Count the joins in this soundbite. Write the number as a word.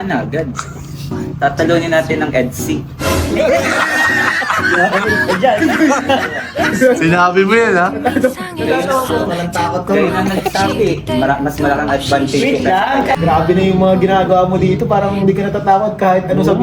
one